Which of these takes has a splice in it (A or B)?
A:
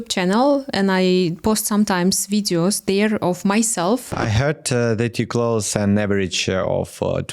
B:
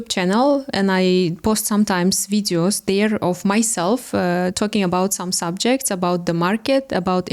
A